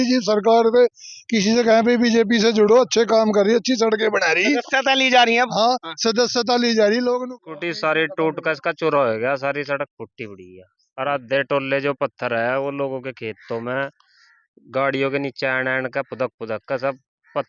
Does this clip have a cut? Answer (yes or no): yes